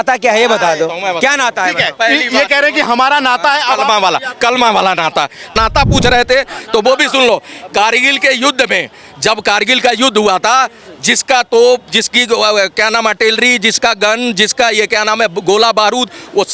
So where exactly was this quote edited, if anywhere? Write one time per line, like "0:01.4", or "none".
0:05.5